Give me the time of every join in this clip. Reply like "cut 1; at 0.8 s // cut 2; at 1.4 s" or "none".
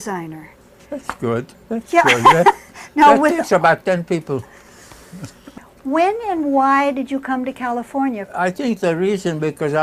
cut 1; at 5.5 s